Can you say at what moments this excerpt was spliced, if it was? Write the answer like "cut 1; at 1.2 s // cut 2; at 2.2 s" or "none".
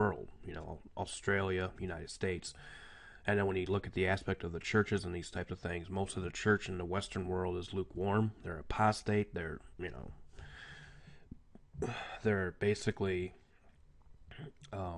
cut 1; at 9.5 s